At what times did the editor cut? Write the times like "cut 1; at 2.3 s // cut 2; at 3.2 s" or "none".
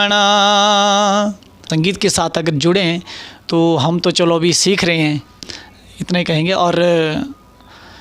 cut 1; at 1.5 s